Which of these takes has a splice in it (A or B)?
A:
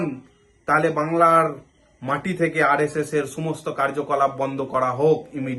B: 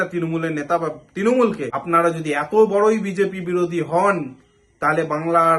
B